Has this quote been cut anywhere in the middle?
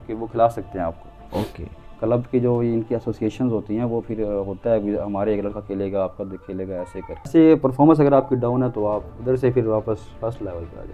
yes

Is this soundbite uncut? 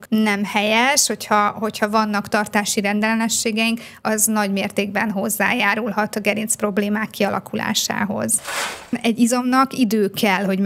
no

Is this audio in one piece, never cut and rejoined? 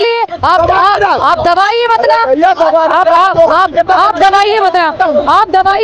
yes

